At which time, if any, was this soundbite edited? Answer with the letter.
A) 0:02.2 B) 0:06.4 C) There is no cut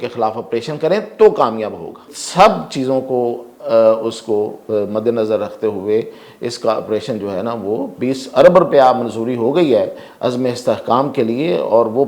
A